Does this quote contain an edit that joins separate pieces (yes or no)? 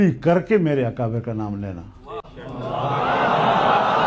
no